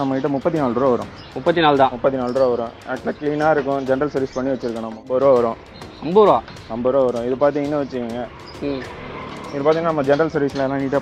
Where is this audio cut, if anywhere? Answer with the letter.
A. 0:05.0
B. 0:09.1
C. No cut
A